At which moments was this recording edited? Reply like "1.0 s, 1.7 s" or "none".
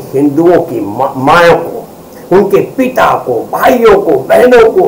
none

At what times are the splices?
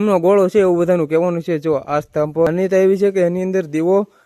2.5 s

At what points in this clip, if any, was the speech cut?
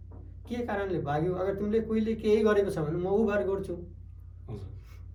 none

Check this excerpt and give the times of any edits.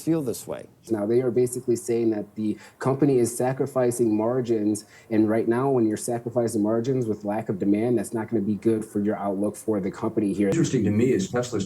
0.8 s, 10.5 s

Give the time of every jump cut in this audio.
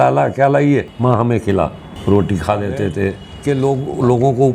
0.9 s, 3.3 s

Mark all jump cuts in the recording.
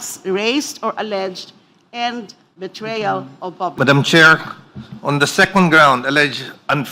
3.7 s

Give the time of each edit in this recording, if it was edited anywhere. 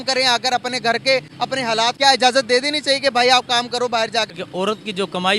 1.9 s, 4.4 s

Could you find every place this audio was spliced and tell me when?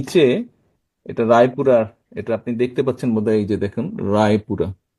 none

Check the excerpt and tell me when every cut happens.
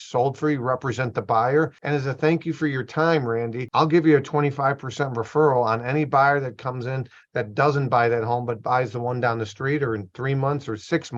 1.8 s, 3.6 s

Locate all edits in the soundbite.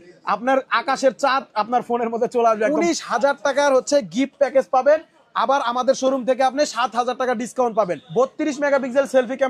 2.7 s, 8.0 s

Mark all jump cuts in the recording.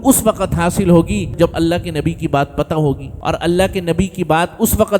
1.3 s, 3.1 s

